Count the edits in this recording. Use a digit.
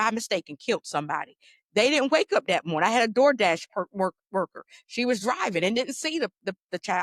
0